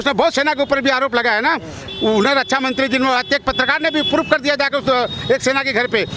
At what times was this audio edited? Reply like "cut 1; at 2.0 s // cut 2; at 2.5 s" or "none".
none